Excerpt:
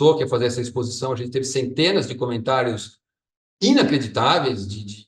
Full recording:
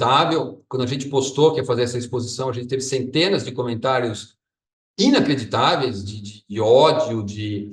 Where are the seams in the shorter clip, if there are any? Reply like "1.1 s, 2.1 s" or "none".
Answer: none

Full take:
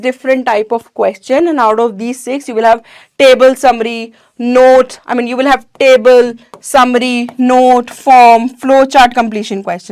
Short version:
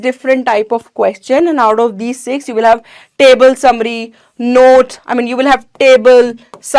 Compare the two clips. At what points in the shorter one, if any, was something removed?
none

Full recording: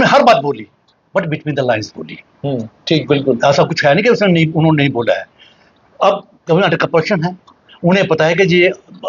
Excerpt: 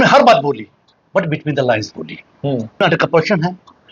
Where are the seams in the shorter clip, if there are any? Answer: 2.8 s

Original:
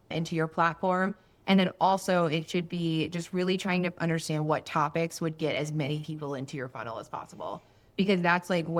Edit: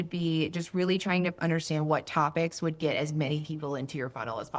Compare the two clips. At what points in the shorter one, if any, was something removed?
none

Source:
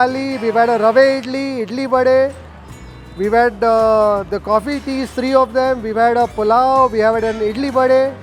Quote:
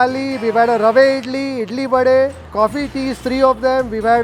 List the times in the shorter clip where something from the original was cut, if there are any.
2.4 s

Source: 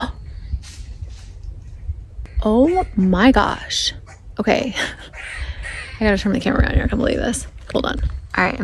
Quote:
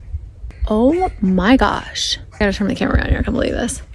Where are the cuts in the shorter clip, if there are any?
2.4 s

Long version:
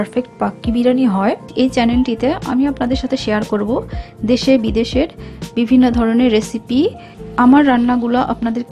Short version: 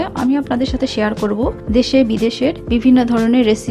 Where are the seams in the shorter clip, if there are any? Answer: 1.6 s, 2.6 s

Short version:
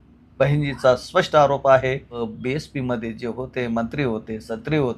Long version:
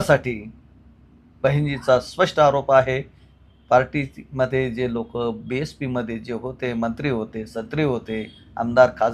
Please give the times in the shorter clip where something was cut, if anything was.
2.2 s

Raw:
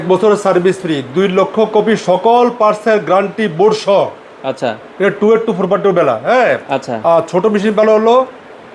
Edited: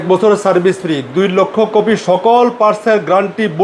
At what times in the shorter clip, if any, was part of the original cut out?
none

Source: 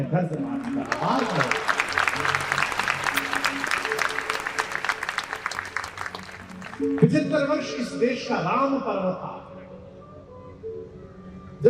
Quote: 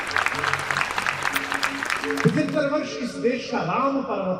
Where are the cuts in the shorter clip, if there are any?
2.0 s

